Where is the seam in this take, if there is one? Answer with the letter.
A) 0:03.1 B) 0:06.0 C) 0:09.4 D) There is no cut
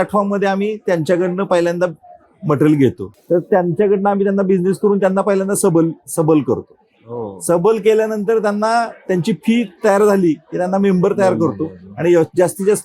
A